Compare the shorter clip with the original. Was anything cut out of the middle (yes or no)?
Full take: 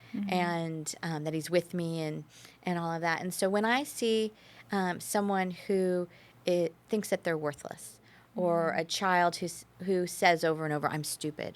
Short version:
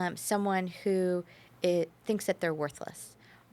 no